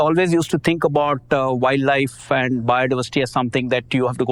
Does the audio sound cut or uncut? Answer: uncut